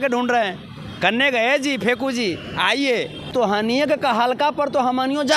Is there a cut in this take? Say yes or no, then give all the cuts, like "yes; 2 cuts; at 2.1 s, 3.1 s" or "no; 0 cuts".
yes; 1 cut; at 3.3 s